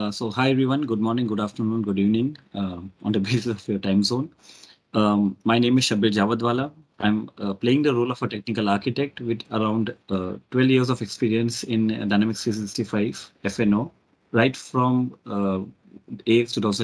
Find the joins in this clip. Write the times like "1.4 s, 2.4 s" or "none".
none